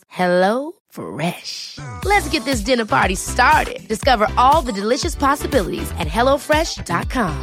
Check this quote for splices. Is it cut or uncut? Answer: uncut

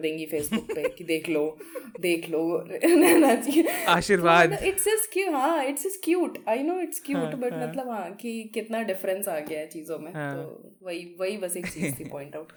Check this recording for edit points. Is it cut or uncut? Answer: uncut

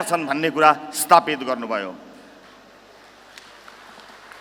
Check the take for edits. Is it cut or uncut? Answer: uncut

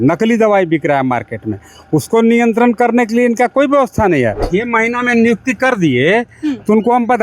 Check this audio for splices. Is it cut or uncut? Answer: cut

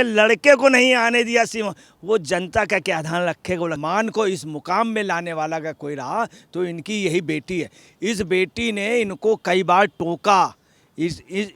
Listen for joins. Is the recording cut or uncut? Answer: cut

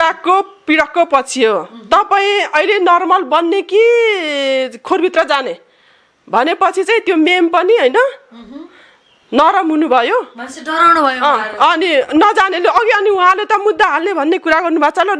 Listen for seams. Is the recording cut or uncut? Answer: uncut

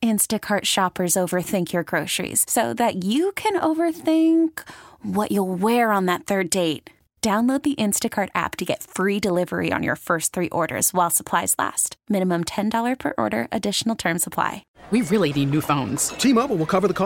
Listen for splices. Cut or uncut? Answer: cut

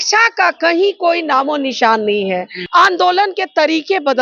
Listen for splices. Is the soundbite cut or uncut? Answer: cut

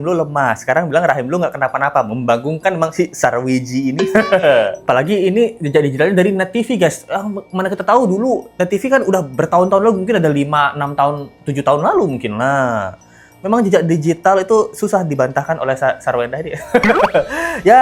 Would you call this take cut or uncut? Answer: uncut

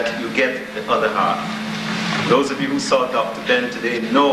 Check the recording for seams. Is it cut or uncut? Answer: uncut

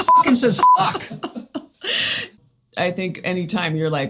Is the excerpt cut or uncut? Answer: cut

